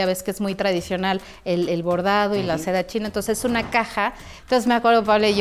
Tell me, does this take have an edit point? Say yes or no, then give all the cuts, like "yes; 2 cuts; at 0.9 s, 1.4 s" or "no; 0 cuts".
yes; 1 cut; at 4.3 s